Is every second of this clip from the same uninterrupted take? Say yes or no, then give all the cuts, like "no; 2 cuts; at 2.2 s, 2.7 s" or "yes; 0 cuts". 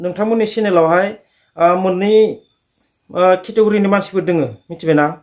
yes; 0 cuts